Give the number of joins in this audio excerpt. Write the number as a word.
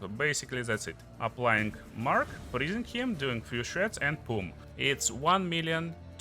two